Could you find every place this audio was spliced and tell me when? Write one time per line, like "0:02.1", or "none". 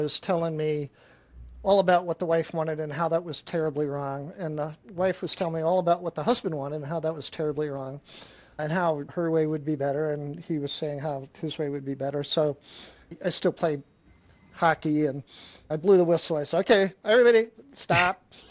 0:13.1